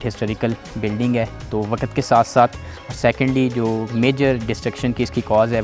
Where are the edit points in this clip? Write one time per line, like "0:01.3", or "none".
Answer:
none